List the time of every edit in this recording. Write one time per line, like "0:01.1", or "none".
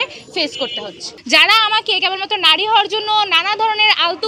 0:01.1